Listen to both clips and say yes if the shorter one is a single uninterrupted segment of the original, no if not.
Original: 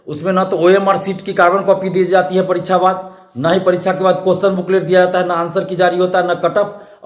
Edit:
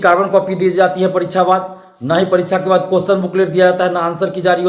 yes